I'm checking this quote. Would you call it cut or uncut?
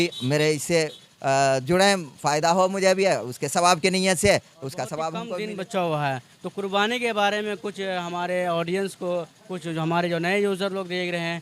cut